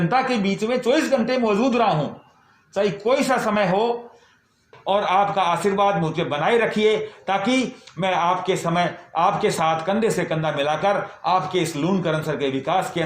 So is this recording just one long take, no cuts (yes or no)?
no